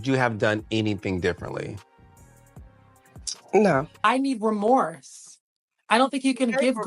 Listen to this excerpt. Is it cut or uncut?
cut